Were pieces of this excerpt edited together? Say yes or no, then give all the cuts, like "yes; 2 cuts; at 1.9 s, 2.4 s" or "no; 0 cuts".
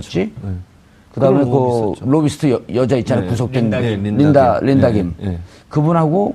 yes; 1 cut; at 5.4 s